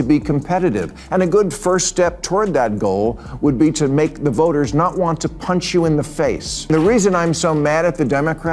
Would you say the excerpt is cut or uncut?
cut